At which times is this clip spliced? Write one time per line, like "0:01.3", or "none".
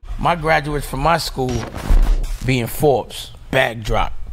none